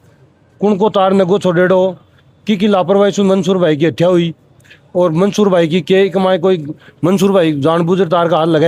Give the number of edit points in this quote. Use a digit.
0